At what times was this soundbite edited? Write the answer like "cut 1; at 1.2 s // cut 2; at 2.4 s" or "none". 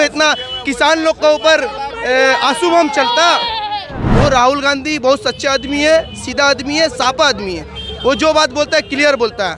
cut 1; at 4.0 s